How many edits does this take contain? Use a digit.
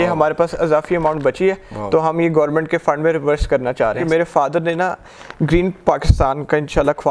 1